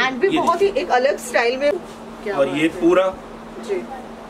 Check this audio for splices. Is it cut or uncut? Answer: cut